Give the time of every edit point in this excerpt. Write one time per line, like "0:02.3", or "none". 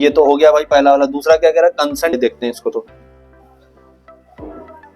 0:02.2